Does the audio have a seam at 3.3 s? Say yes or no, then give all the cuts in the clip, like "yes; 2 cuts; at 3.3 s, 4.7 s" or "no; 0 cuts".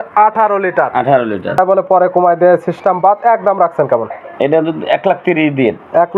no; 1 cut; at 1.6 s